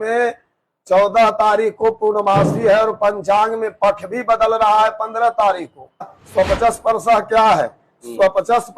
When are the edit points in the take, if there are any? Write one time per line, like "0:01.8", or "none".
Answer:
0:06.2